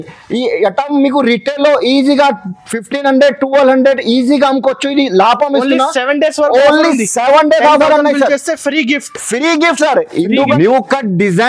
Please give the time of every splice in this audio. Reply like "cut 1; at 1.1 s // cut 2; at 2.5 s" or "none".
cut 1; at 10.5 s